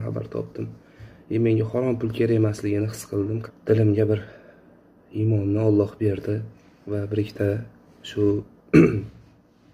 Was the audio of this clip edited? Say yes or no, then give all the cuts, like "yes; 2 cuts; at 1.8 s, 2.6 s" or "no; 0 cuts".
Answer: no; 0 cuts